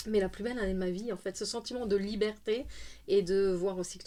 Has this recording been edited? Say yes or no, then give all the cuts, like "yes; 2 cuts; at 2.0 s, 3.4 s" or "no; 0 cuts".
no; 0 cuts